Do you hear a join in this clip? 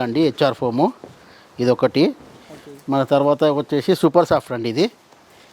no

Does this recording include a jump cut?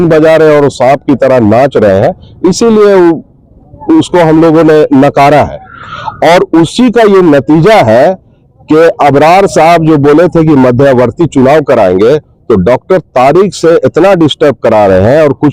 no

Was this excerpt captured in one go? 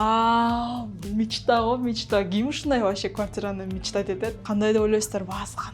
no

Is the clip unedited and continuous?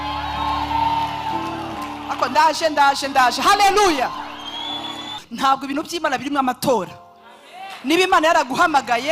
no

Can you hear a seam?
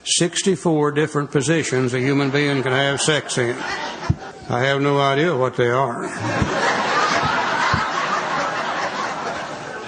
yes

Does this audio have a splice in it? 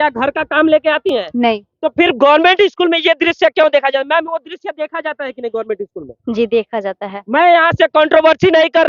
no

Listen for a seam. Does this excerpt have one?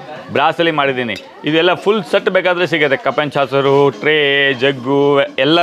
no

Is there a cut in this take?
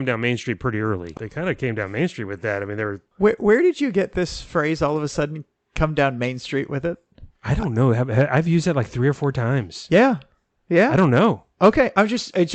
yes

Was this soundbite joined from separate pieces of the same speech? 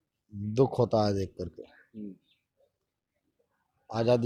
no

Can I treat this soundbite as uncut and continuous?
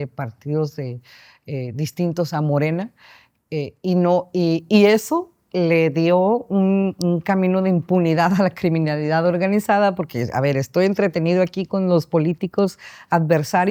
yes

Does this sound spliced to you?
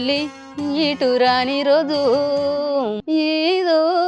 yes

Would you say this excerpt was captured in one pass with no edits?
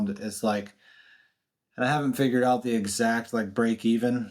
yes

